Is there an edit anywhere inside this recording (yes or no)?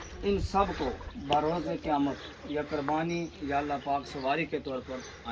no